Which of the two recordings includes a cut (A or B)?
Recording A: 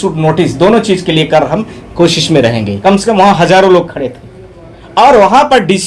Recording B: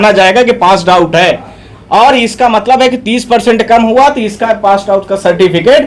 A